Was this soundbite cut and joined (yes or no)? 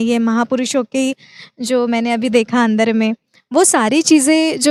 no